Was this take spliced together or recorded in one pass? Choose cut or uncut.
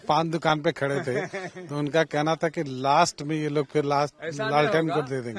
uncut